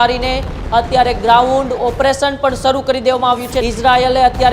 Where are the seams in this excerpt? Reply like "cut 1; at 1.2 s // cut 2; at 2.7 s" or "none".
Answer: cut 1; at 3.6 s